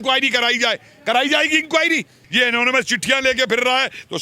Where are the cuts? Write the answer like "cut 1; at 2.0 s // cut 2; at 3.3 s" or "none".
cut 1; at 2.2 s